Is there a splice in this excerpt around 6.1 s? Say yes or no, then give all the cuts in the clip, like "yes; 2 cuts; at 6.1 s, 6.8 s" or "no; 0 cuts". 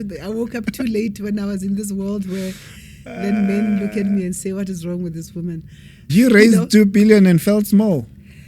yes; 1 cut; at 6.1 s